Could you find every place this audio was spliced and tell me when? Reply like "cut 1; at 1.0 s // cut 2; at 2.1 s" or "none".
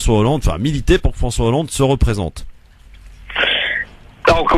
cut 1; at 3.1 s

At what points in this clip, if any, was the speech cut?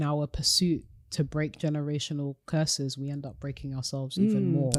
none

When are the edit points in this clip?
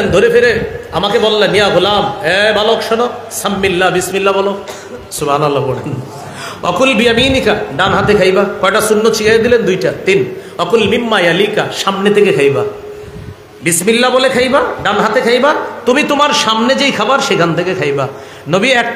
none

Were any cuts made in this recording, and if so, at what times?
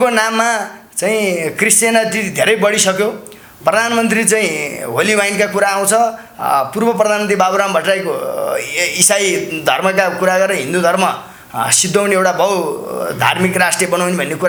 none

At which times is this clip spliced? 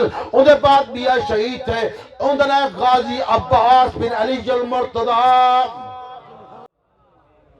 cut 1; at 6.7 s

